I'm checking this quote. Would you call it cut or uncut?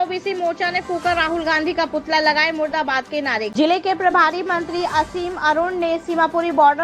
cut